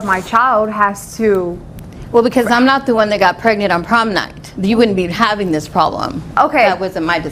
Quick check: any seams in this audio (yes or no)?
no